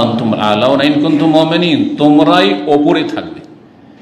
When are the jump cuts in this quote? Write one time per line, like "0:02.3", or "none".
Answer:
none